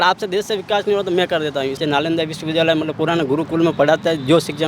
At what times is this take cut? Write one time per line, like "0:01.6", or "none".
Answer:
0:01.8